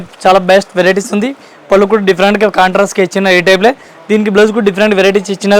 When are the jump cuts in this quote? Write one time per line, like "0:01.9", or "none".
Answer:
none